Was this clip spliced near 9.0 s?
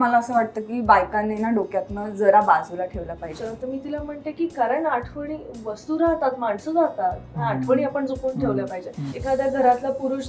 yes; 2 cuts; at 3.4 s, 9.0 s

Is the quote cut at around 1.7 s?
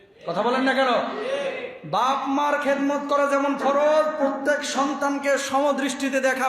no; 0 cuts

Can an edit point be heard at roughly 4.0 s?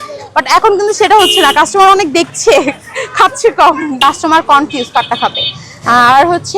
yes; 1 cut; at 4.0 s

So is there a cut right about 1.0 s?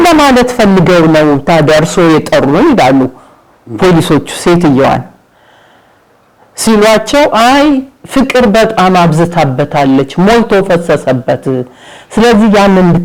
no; 0 cuts

